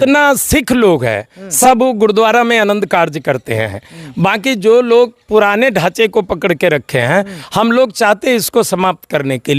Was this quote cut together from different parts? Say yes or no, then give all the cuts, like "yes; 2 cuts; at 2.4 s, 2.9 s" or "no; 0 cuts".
no; 0 cuts